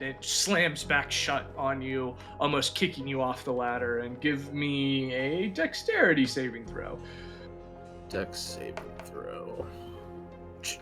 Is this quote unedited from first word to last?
yes; 0 cuts

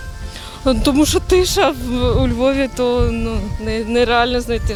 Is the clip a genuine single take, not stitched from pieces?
yes; 0 cuts

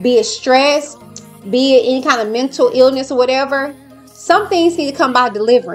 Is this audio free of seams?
yes; 0 cuts

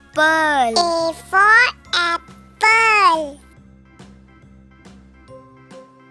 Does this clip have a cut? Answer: no; 0 cuts

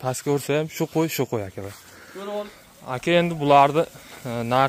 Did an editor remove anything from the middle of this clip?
yes; 1 cut; at 2.5 s

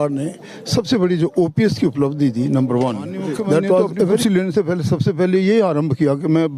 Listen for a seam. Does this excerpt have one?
yes; 1 cut; at 4.2 s

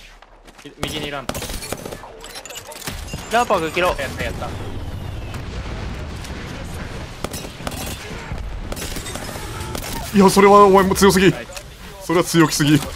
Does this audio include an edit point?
no; 0 cuts

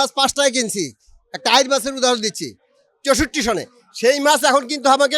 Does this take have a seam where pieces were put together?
no; 0 cuts

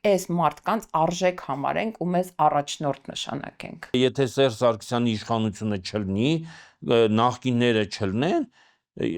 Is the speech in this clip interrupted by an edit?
yes; 1 cut; at 3.9 s

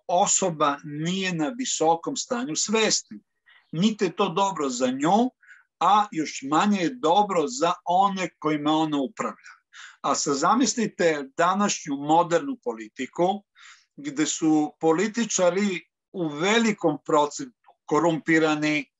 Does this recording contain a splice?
no; 0 cuts

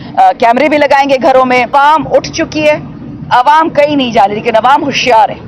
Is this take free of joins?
no; 1 cut; at 1.7 s

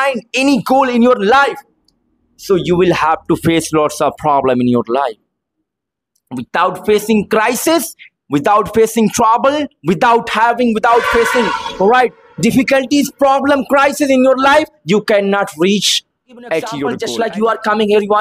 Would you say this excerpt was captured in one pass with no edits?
no; 1 cut; at 17.0 s

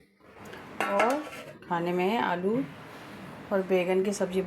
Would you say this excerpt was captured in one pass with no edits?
yes; 0 cuts

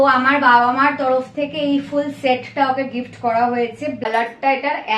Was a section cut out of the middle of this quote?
yes; 1 cut; at 4.0 s

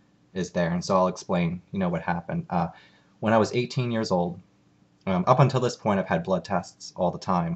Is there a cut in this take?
yes; 1 cut; at 5.5 s

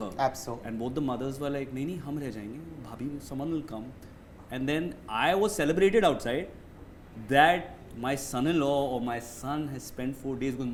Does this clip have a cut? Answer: no; 0 cuts

